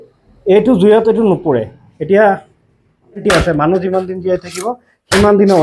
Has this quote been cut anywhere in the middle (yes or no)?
yes